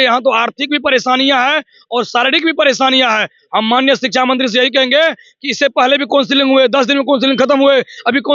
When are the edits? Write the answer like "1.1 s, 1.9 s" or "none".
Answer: none